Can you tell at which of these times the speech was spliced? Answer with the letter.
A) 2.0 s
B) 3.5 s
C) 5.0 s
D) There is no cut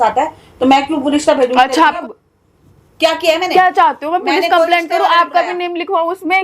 A